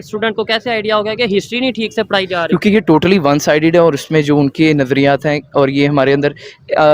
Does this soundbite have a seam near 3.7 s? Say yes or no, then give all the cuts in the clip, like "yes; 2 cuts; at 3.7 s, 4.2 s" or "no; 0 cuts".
no; 0 cuts